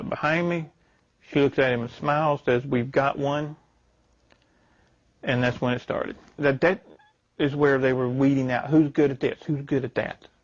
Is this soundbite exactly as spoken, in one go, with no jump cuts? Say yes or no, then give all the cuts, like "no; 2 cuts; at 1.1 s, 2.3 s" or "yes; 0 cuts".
no; 1 cut; at 6.4 s